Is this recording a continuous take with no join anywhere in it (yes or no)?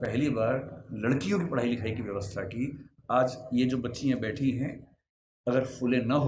yes